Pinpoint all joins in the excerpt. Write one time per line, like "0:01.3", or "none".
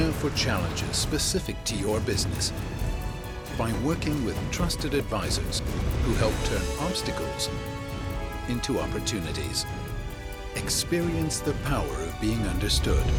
none